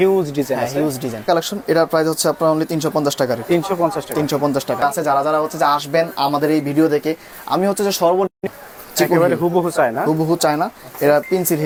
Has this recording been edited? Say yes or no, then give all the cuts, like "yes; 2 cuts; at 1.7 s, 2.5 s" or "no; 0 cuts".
no; 0 cuts